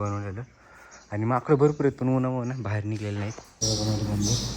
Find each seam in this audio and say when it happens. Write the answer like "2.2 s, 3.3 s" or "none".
3.5 s